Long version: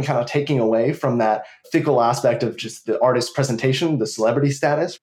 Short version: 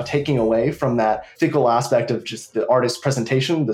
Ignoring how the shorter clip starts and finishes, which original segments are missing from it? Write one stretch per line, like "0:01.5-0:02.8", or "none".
0:01.5-0:01.6